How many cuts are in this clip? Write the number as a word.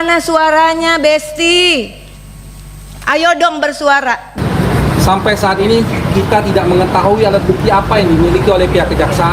one